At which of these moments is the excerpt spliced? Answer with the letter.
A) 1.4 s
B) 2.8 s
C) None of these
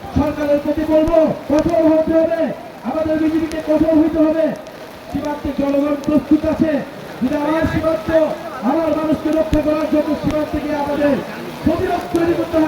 A